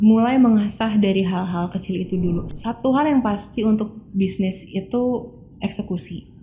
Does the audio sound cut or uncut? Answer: cut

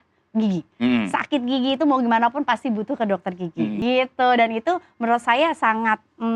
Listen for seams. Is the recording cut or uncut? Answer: cut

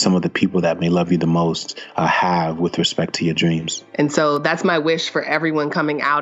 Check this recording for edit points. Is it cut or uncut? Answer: cut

